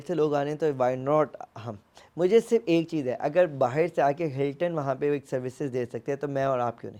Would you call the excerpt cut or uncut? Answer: uncut